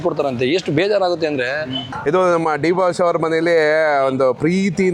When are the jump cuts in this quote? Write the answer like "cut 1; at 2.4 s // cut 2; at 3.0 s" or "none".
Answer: cut 1; at 1.9 s